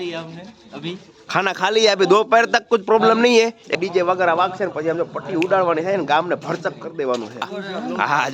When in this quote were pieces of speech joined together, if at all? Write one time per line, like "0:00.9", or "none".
0:03.7
0:07.5